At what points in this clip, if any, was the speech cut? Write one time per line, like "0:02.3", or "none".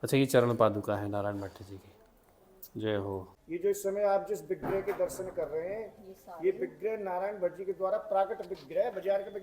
0:03.3